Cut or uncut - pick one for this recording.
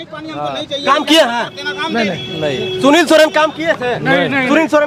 uncut